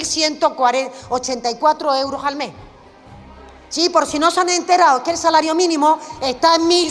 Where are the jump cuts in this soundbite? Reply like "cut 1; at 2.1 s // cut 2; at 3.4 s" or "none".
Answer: none

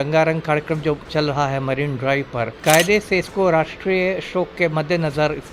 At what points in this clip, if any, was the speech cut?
cut 1; at 2.5 s

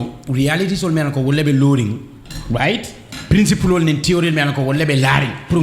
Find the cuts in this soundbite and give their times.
none

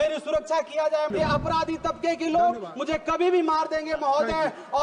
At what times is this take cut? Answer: cut 1; at 1.1 s

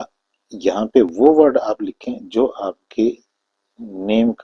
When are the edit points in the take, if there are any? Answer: none

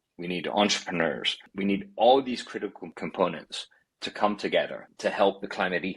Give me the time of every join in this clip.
cut 1; at 1.4 s // cut 2; at 2.9 s

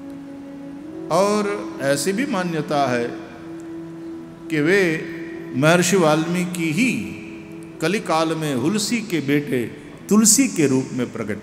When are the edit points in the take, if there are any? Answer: none

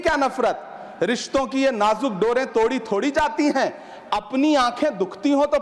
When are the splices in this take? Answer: none

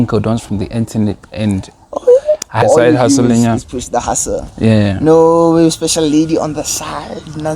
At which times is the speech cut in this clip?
cut 1; at 2.6 s

